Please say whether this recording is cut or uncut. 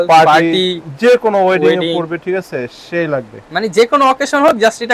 uncut